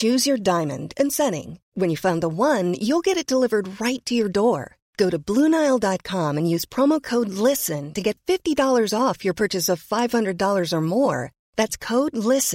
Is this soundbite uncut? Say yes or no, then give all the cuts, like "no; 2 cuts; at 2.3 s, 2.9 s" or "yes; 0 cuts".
yes; 0 cuts